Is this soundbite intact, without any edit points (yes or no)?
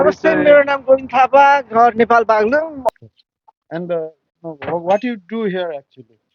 no